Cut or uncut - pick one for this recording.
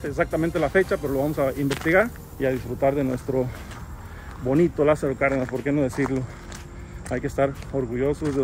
cut